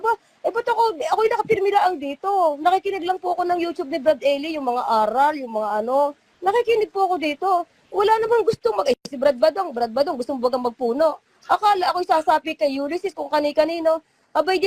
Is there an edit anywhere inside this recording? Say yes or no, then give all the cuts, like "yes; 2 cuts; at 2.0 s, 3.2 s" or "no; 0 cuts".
no; 0 cuts